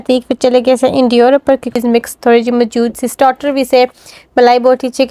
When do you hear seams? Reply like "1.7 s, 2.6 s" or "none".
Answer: 1.7 s